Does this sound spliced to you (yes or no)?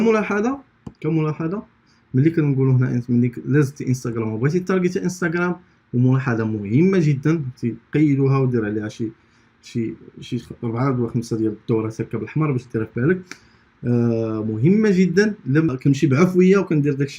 yes